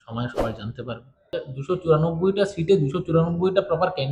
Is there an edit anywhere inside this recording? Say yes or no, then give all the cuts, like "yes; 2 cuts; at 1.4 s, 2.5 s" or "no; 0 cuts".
yes; 1 cut; at 1.5 s